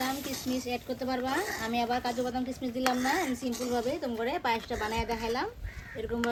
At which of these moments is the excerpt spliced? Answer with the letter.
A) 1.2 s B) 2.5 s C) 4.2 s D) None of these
D